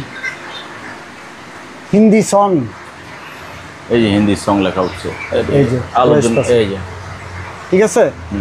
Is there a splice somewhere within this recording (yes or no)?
no